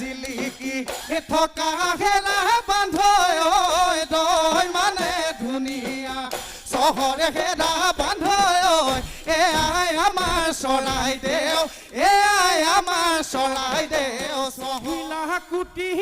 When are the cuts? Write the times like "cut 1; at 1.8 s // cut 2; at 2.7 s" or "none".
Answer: cut 1; at 14.7 s